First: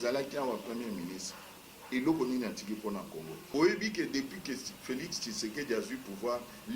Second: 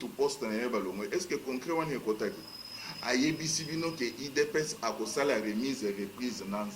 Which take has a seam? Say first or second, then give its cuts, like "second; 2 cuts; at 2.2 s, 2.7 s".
first; 1 cut; at 3.4 s